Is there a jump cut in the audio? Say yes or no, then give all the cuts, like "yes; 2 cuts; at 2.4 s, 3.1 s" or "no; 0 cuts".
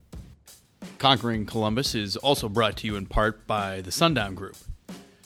yes; 1 cut; at 1.0 s